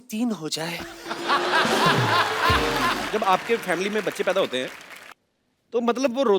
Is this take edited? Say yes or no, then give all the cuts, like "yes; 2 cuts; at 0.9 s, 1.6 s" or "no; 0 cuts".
yes; 1 cut; at 3.1 s